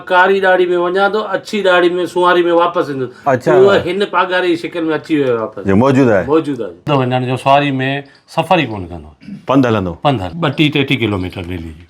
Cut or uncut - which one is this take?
cut